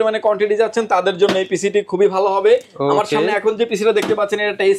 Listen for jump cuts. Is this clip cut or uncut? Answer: uncut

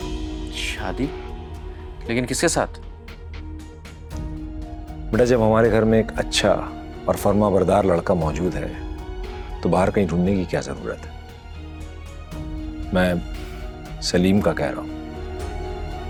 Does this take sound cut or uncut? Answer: uncut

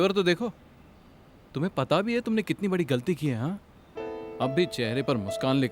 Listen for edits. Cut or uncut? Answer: uncut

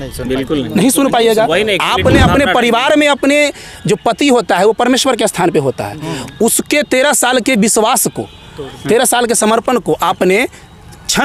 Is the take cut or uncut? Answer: uncut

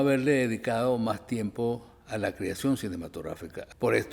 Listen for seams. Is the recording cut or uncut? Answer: uncut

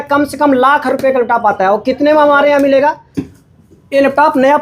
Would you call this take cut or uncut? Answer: uncut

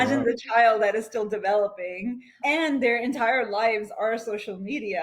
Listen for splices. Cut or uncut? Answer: uncut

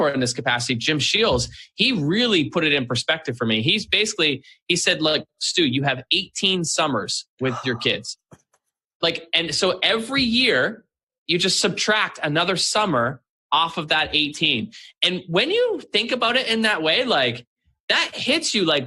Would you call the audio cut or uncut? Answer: uncut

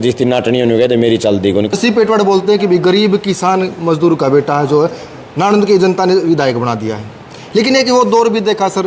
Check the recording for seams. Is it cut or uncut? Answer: cut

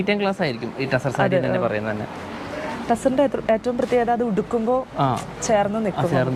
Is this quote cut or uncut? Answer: uncut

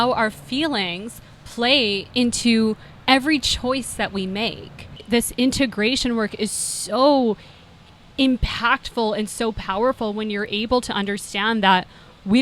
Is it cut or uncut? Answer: cut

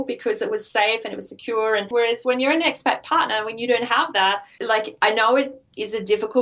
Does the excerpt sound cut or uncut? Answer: cut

